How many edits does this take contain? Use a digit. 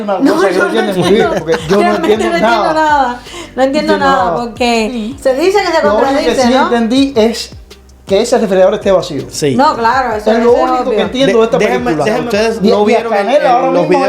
2